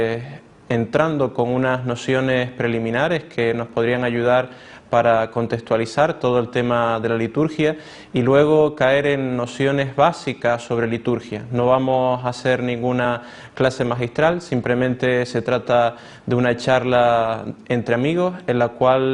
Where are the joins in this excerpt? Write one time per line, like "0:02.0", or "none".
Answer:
none

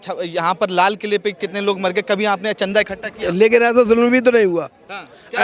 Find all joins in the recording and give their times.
none

